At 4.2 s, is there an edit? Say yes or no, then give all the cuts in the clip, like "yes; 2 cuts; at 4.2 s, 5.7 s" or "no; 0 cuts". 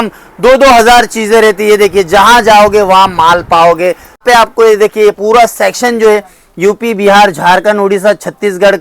yes; 1 cut; at 4.2 s